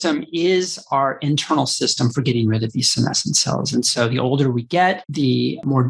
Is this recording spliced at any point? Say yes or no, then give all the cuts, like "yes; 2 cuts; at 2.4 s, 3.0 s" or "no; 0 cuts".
no; 0 cuts